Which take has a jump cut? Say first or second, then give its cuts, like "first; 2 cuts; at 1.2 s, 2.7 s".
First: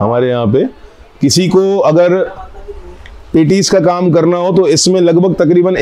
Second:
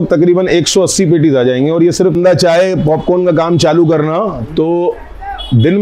second; 1 cut; at 2.1 s